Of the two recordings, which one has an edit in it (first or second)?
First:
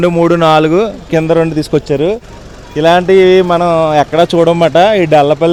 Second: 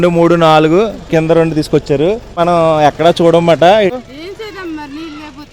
second